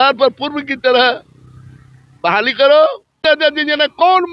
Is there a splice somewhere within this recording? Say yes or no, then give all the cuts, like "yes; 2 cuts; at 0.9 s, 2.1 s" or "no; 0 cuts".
yes; 1 cut; at 3.2 s